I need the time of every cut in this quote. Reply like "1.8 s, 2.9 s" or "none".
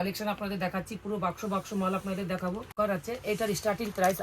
2.7 s